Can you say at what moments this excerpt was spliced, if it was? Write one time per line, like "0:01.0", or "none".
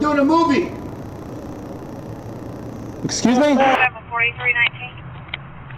0:03.8